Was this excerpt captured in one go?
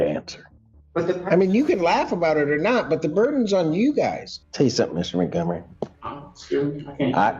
no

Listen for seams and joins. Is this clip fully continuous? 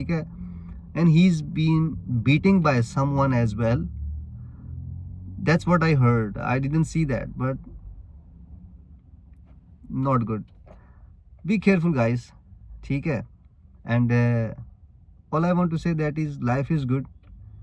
yes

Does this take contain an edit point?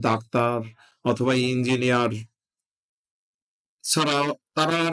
no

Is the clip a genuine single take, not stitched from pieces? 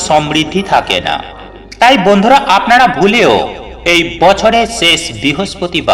yes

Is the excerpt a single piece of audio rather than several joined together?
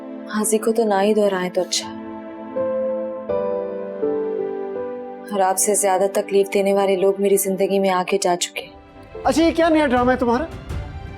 no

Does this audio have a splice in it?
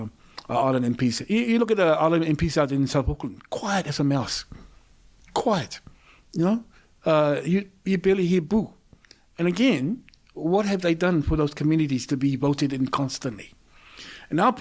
no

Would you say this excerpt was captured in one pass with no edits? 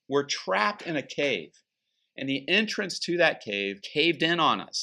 no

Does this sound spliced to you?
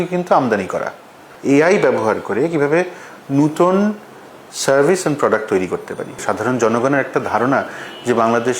yes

